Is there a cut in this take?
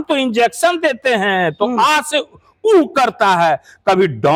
no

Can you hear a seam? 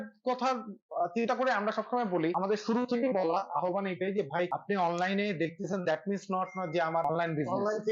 yes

